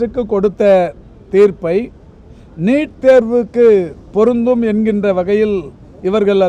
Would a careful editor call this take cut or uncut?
uncut